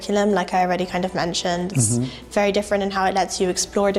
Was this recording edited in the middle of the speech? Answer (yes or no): no